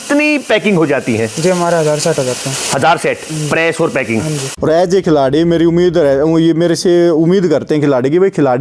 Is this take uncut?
no; 1 cut; at 4.5 s

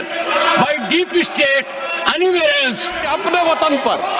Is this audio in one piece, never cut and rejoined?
no; 1 cut; at 3.1 s

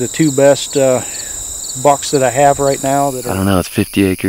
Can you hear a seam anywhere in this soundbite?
yes; 1 cut; at 3.2 s

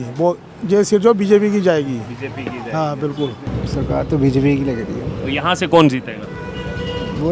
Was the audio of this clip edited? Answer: yes; 1 cut; at 3.5 s

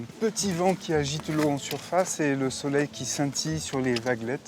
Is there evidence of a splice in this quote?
no; 0 cuts

